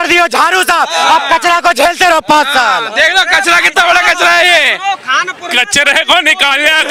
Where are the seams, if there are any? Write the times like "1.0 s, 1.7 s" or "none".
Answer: none